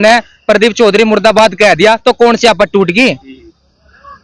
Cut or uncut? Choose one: uncut